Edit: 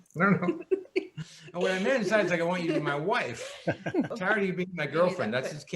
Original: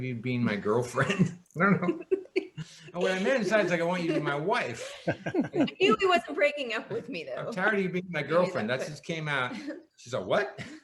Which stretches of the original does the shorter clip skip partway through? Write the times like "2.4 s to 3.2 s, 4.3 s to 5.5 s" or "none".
5.5 s to 7.5 s